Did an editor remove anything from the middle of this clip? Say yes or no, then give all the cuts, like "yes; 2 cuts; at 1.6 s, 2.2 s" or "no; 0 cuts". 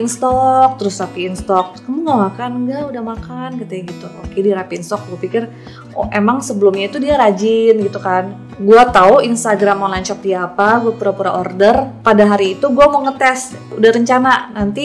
yes; 3 cuts; at 8.4 s, 11.9 s, 13.7 s